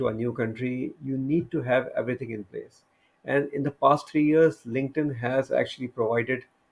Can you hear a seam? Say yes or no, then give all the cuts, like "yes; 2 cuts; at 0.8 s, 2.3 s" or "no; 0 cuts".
no; 0 cuts